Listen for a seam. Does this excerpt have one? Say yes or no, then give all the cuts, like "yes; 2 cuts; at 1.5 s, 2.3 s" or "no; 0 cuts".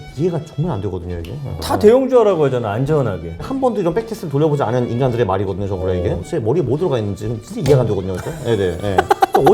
yes; 3 cuts; at 1.6 s, 3.5 s, 6.2 s